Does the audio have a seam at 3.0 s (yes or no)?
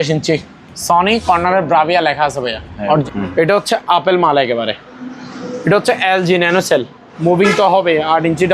yes